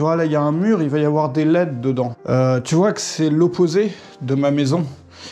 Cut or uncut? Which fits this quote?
cut